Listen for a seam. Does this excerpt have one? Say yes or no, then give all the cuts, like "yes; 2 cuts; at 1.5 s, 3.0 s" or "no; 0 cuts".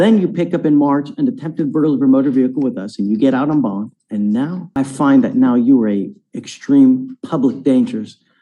yes; 2 cuts; at 4.6 s, 5.8 s